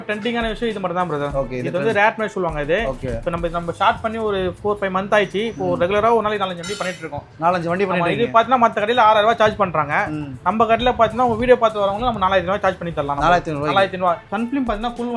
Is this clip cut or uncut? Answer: cut